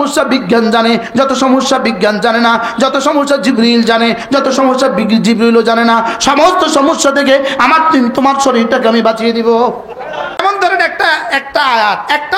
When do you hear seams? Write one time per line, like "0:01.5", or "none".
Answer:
0:10.4